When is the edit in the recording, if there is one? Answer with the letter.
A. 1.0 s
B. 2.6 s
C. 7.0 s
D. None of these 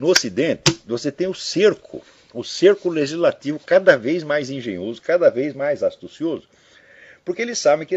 D